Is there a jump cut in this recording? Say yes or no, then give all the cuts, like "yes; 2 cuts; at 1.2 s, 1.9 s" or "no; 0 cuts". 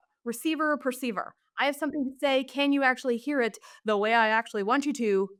no; 0 cuts